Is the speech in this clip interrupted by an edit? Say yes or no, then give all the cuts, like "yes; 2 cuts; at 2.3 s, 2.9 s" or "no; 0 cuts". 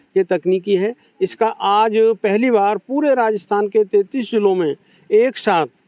no; 0 cuts